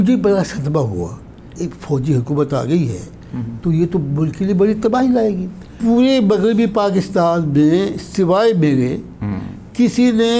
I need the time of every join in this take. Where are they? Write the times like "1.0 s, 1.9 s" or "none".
1.5 s, 5.8 s